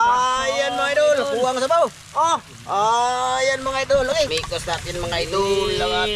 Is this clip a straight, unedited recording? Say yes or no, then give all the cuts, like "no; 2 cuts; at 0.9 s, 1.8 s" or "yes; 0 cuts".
no; 1 cut; at 4.3 s